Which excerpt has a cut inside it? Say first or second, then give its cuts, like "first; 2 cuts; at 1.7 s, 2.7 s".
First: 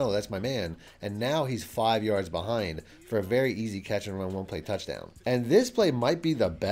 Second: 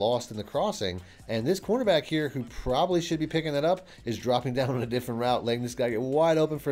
first; 1 cut; at 5.1 s